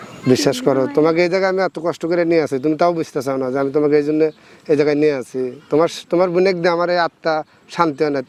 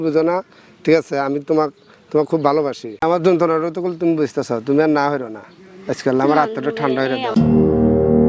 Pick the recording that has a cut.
second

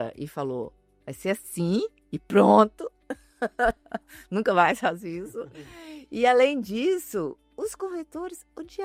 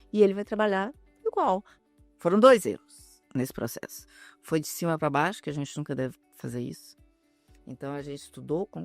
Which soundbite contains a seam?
second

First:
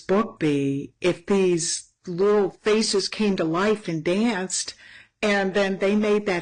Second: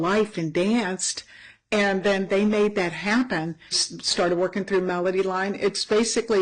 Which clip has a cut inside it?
second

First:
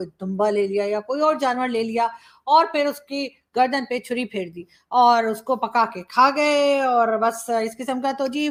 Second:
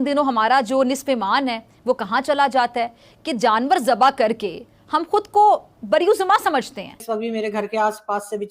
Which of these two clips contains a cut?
second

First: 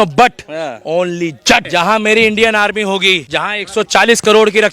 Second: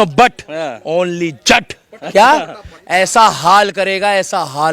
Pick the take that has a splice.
first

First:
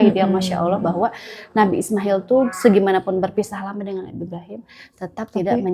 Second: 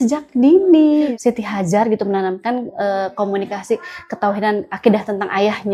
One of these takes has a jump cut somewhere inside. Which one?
second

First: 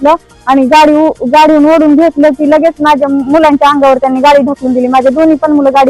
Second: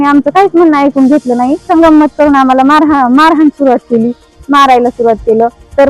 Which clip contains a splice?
second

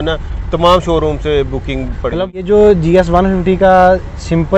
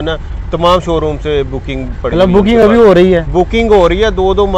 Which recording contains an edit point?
first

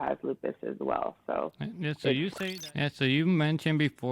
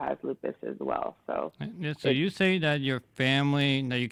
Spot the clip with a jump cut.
first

